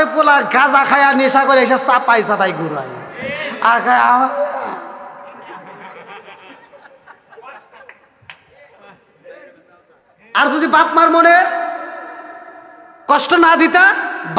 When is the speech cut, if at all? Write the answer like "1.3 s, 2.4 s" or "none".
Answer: none